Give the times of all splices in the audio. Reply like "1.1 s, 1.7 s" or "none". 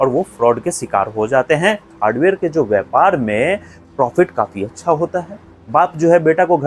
1.9 s, 5.7 s